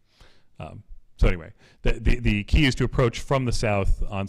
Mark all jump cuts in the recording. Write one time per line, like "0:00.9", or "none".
0:02.9